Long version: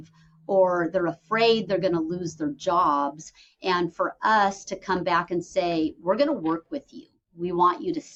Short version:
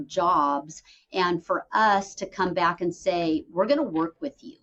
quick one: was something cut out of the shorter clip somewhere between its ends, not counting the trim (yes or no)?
no